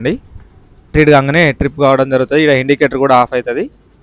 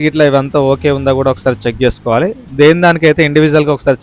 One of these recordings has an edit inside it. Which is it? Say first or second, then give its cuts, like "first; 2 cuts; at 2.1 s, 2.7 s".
first; 1 cut; at 0.9 s